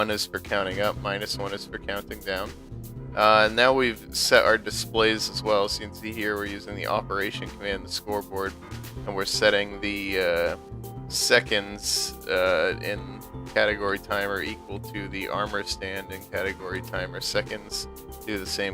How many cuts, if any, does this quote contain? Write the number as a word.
one